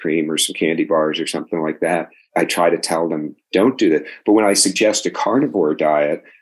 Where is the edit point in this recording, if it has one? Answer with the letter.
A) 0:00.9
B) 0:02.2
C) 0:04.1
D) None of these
B